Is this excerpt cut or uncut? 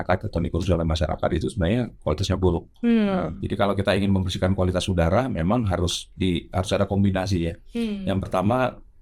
uncut